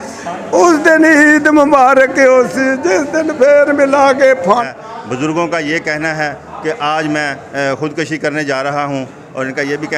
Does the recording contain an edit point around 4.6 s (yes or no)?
yes